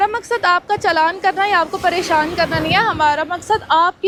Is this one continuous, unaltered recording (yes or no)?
yes